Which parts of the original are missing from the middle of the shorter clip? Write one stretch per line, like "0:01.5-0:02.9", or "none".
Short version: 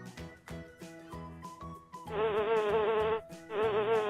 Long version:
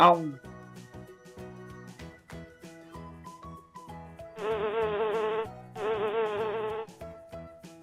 0:03.9-0:04.4